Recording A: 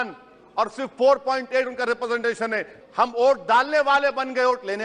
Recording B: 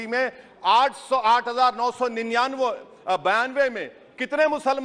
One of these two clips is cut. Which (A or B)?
A